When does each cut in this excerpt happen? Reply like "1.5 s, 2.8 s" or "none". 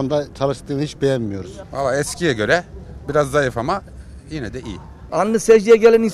1.6 s, 5.0 s